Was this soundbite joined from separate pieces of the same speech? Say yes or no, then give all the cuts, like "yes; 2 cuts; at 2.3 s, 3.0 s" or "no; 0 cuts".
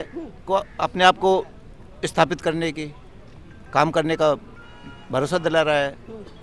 no; 0 cuts